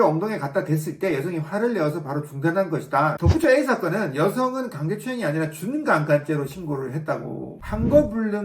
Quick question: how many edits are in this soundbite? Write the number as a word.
two